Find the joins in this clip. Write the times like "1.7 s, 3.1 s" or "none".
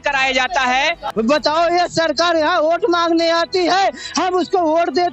1.0 s